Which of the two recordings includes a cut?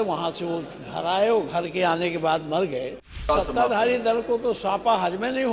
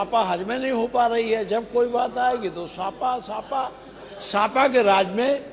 first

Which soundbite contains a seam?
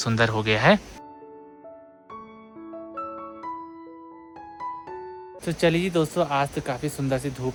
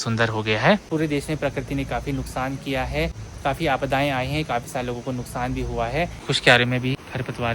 second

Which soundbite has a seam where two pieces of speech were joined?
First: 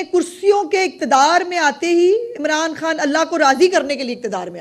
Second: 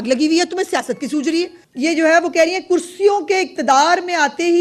second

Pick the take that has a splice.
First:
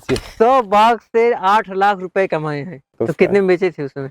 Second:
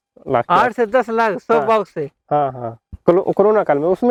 first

